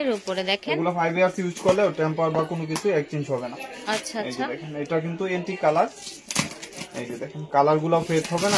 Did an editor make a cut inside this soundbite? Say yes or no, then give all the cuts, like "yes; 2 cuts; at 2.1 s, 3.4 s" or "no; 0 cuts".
no; 0 cuts